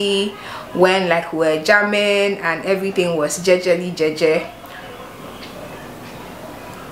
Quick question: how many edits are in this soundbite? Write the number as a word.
zero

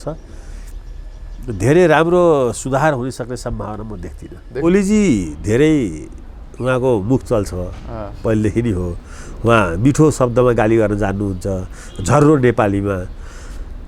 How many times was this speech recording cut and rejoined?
one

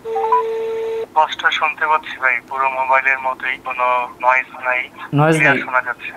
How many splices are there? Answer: one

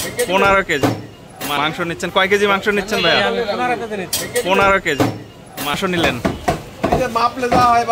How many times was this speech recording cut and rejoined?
two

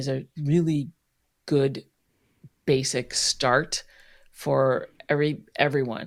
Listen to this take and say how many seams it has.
zero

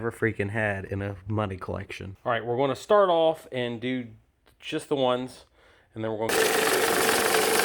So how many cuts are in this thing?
two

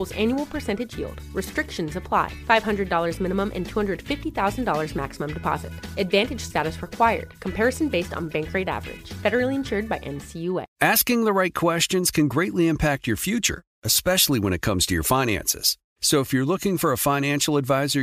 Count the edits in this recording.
one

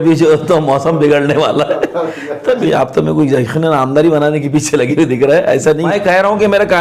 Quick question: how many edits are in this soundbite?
two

